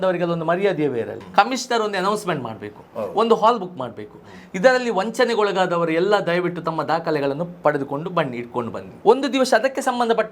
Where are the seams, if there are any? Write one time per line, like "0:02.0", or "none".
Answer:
0:01.2
0:08.8